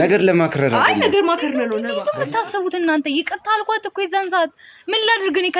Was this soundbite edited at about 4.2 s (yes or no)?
no